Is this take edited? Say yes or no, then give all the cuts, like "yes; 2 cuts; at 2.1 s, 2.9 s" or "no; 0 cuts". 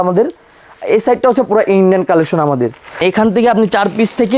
yes; 1 cut; at 3.0 s